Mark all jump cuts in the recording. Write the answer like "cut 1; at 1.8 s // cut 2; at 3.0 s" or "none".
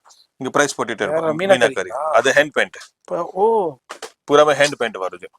none